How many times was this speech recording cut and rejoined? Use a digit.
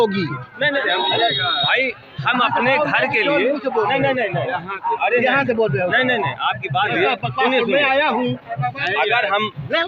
2